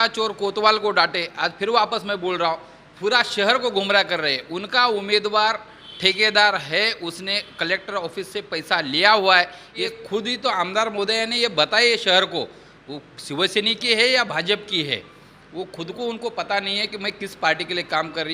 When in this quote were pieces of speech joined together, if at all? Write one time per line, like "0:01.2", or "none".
0:09.9